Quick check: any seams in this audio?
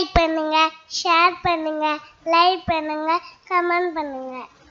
no; 0 cuts

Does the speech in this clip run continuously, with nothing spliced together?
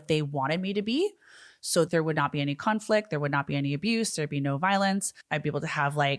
no; 1 cut; at 1.9 s

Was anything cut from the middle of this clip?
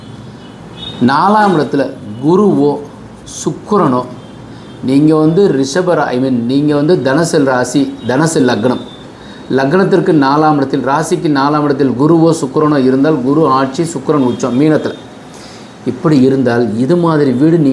no; 0 cuts

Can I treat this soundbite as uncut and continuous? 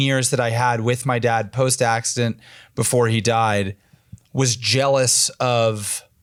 yes; 0 cuts

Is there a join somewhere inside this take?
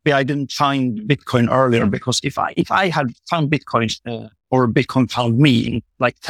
no; 0 cuts

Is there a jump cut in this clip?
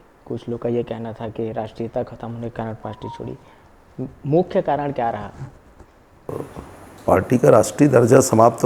yes; 1 cut; at 6.5 s

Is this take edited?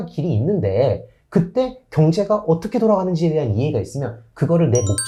no; 0 cuts

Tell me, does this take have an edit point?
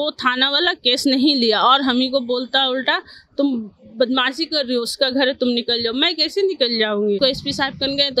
yes; 1 cut; at 7.2 s

